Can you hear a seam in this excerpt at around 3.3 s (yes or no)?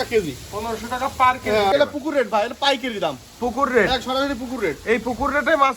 no